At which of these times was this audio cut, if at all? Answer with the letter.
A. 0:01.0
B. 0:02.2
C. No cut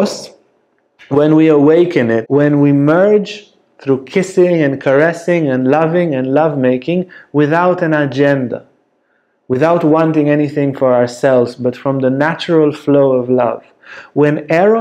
B